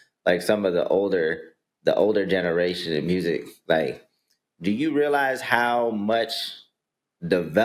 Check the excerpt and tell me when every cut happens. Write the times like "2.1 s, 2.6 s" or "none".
none